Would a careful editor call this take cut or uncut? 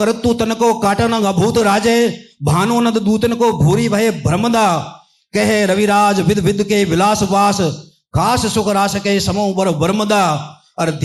uncut